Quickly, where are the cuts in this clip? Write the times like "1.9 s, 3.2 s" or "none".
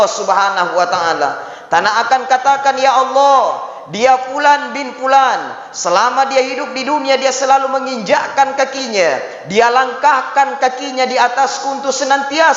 none